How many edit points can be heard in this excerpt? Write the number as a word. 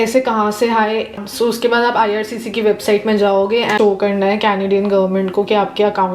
two